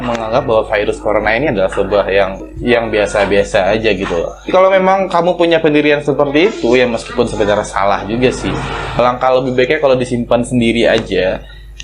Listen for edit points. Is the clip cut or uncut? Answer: cut